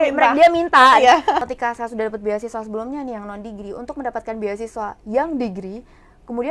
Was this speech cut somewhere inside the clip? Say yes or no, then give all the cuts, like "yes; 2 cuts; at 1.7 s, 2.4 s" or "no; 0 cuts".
yes; 1 cut; at 1.4 s